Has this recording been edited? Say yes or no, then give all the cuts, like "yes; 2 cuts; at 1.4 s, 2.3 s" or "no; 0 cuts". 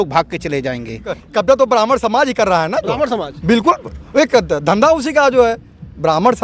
yes; 1 cut; at 1.1 s